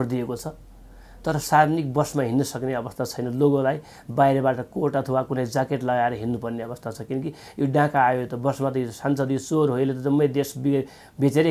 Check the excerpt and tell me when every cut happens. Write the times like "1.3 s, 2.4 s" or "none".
none